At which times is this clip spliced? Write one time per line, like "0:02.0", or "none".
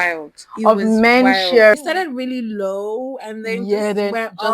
0:01.7